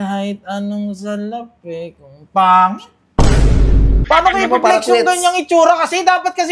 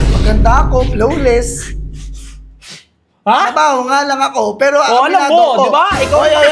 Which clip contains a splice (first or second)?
first